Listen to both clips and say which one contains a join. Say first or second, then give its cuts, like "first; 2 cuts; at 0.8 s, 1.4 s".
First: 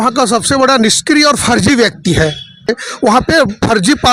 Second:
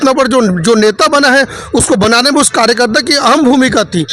first; 1 cut; at 2.8 s